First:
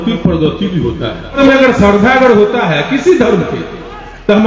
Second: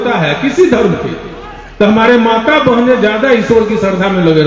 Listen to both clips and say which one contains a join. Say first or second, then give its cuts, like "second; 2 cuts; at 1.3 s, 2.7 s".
first; 1 cut; at 1.4 s